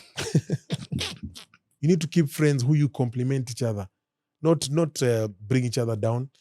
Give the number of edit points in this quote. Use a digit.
1